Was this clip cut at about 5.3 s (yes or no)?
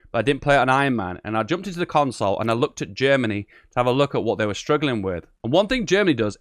yes